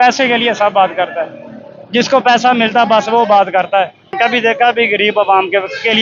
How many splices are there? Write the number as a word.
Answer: one